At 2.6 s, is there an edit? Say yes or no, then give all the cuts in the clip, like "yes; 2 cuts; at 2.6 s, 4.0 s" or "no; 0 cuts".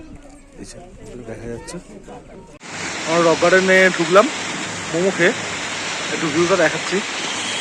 yes; 1 cut; at 2.6 s